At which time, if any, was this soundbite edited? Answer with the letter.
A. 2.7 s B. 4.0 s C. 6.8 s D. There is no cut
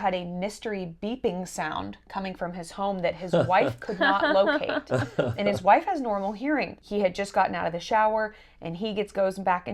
C